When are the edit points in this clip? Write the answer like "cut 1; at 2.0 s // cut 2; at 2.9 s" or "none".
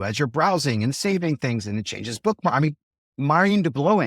cut 1; at 3.2 s